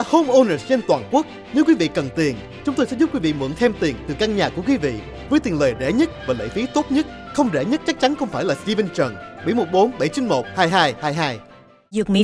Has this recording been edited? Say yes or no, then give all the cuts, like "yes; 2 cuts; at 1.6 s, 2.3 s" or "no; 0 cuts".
no; 0 cuts